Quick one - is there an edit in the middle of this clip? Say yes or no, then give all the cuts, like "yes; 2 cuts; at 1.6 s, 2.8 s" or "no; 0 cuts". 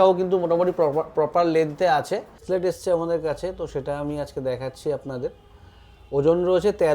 yes; 1 cut; at 2.4 s